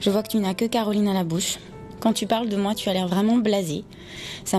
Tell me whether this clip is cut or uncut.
uncut